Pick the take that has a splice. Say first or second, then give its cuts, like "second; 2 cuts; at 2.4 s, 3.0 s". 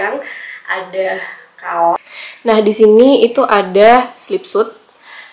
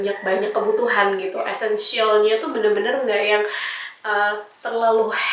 first; 1 cut; at 2.0 s